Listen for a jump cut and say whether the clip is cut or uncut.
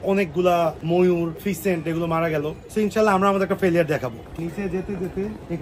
cut